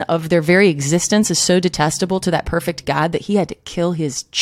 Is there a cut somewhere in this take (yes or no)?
no